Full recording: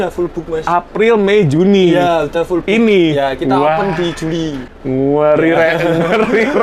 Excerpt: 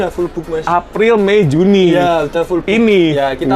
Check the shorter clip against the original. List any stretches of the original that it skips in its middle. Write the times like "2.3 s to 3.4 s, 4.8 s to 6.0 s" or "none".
none